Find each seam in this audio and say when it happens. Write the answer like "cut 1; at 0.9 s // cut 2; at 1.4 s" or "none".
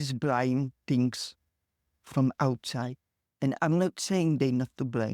none